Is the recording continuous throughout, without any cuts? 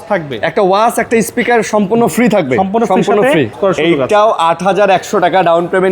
no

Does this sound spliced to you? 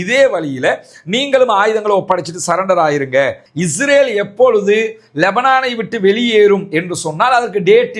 yes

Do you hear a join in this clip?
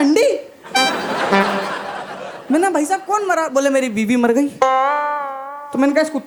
no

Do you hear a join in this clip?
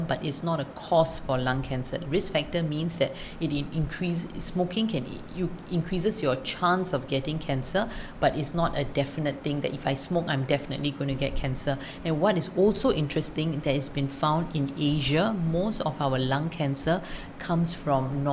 no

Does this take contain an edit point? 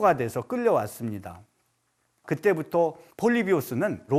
no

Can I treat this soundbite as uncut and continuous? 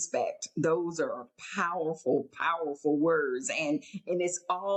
yes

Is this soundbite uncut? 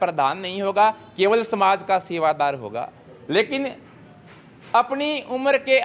yes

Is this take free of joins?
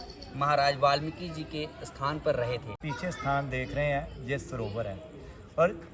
no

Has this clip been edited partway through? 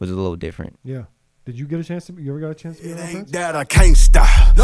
yes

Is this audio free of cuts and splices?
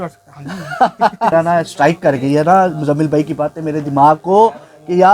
no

